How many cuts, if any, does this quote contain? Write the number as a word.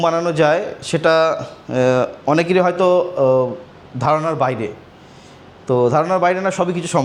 zero